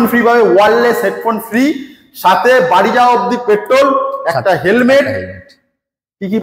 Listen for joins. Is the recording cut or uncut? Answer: uncut